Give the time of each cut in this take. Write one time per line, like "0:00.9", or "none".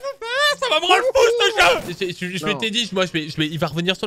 0:01.9